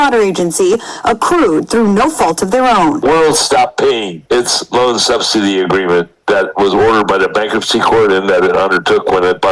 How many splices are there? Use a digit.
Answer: 1